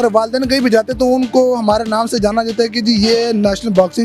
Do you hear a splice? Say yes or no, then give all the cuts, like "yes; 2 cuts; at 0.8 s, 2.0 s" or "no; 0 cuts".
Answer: no; 0 cuts